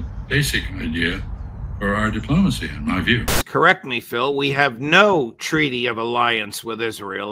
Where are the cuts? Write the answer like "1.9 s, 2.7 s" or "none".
3.3 s